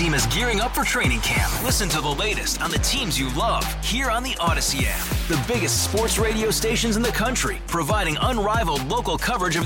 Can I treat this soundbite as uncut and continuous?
yes; 0 cuts

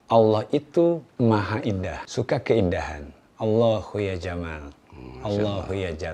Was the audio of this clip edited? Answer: yes; 2 cuts; at 1.1 s, 2.0 s

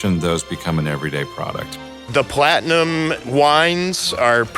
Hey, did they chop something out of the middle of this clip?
yes; 2 cuts; at 1.7 s, 3.2 s

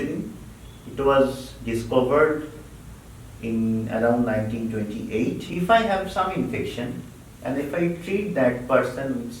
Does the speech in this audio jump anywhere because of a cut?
yes; 1 cut; at 5.5 s

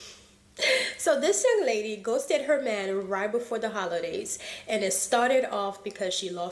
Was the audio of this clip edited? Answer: no; 0 cuts

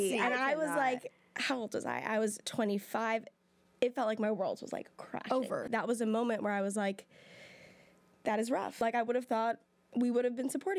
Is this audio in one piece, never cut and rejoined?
no; 2 cuts; at 5.6 s, 8.7 s

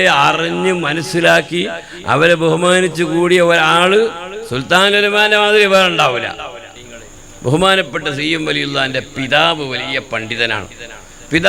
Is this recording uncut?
no; 1 cut; at 6.7 s

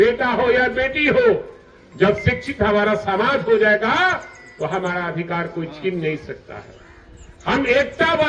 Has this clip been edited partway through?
no; 0 cuts

